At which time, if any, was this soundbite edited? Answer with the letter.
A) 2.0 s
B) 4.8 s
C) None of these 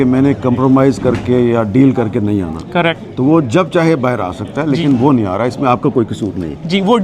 C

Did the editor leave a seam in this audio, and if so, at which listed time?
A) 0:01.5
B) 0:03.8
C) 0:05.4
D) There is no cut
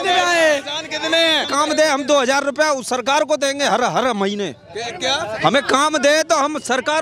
A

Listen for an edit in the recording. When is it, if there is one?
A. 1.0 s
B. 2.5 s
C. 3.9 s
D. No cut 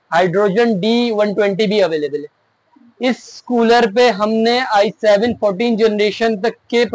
D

